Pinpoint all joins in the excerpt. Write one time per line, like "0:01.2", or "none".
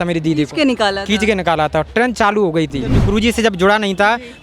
0:03.0